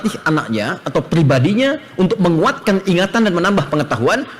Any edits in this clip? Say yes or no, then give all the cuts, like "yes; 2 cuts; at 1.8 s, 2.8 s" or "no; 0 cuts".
no; 0 cuts